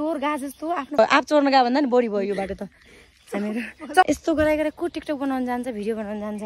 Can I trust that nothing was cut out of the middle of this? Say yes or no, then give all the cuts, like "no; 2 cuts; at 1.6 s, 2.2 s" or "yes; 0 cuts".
no; 2 cuts; at 1.0 s, 4.0 s